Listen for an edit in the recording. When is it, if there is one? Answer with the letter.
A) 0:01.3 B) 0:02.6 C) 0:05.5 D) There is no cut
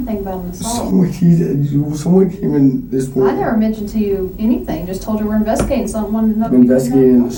D